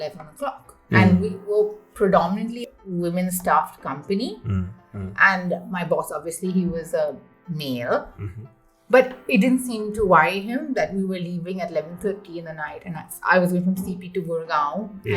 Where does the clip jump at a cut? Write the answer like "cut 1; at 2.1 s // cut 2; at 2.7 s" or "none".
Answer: cut 1; at 2.6 s